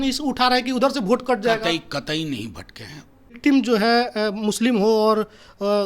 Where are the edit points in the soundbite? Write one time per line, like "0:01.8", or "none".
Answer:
0:03.4